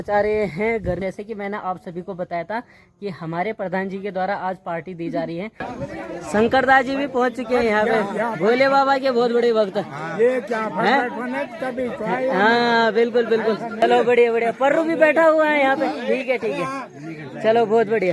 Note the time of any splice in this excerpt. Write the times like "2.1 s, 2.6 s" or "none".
1.0 s, 5.6 s, 13.8 s